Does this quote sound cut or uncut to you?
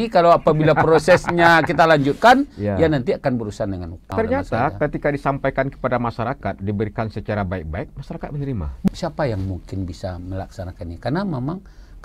cut